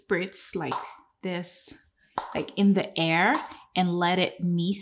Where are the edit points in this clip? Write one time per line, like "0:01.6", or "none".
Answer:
none